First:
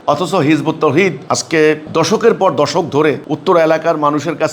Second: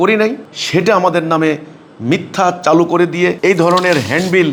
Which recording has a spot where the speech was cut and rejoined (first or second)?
first